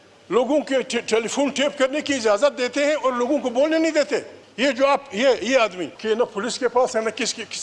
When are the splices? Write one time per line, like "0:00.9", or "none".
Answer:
0:04.4
0:05.9